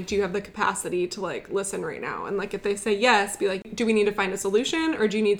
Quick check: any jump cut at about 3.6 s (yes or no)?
yes